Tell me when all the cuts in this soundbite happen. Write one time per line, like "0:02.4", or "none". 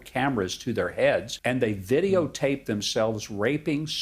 0:01.3